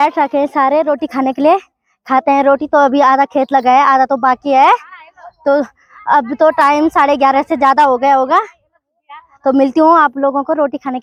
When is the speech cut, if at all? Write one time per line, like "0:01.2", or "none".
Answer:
none